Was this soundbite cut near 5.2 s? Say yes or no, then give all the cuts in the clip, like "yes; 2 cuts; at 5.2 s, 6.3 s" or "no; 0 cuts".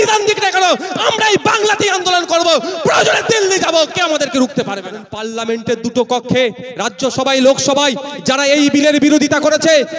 yes; 1 cut; at 5.2 s